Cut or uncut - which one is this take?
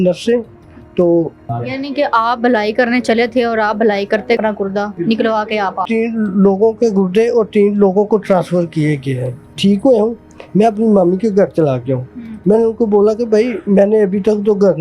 cut